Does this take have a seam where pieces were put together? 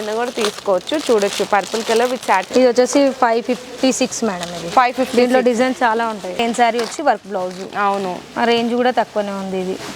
yes; 2 cuts; at 2.5 s, 6.4 s

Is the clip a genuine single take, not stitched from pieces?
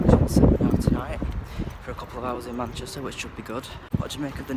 yes; 0 cuts

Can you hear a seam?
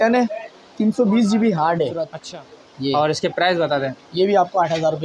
yes; 1 cut; at 2.2 s

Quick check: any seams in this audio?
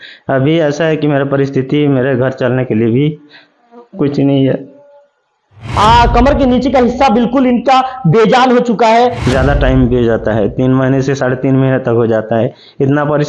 yes; 2 cuts; at 5.6 s, 9.2 s

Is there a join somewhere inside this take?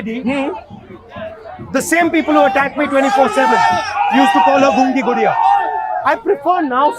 yes; 1 cut; at 6.0 s

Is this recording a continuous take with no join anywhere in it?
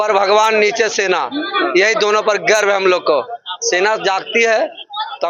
yes; 0 cuts

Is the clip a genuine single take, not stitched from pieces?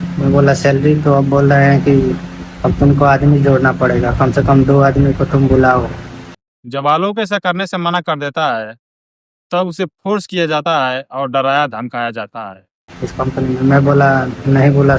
yes; 0 cuts

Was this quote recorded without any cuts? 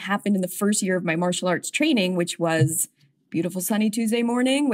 yes; 0 cuts

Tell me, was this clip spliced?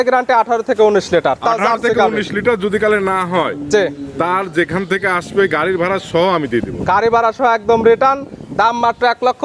no; 0 cuts

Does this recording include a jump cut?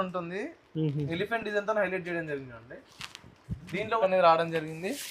yes; 1 cut; at 4.0 s

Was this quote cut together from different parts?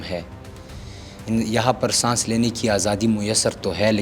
no; 0 cuts

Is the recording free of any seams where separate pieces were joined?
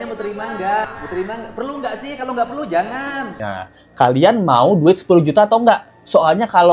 yes; 0 cuts

